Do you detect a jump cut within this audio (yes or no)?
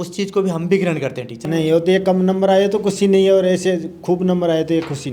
yes